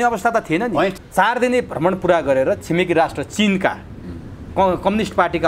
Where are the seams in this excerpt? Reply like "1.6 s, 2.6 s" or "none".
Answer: 1.0 s